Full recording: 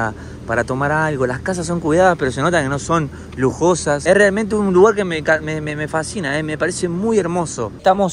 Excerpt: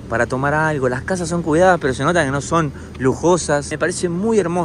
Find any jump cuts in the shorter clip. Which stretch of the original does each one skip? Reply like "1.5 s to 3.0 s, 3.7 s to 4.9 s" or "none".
4.0 s to 6.4 s